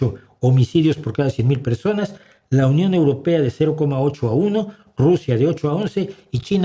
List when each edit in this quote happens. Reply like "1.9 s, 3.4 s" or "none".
none